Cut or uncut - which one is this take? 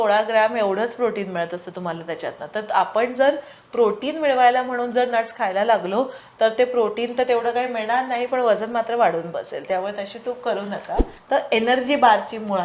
cut